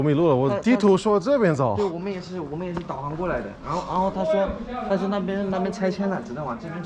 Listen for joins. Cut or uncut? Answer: uncut